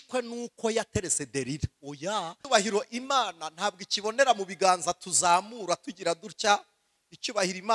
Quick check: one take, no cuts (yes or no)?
no